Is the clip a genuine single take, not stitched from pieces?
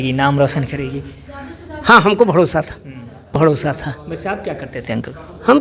yes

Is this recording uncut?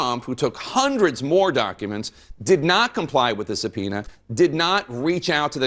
yes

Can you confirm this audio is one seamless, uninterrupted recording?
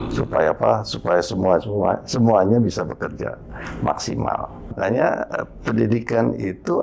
no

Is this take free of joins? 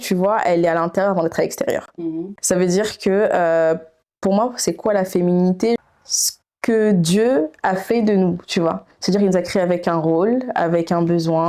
yes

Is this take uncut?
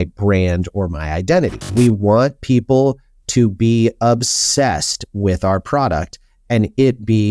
no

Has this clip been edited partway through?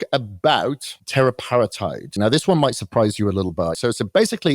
yes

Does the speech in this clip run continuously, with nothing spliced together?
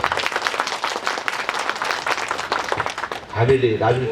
yes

